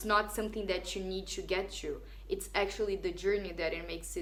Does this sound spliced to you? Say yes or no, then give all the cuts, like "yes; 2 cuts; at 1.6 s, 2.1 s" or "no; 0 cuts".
no; 0 cuts